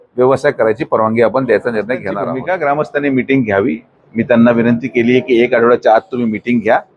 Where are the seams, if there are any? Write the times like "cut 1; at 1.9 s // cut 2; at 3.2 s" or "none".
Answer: cut 1; at 2.2 s